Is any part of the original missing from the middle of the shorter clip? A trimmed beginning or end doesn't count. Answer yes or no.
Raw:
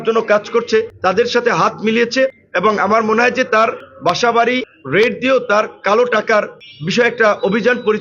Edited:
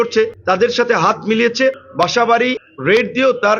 yes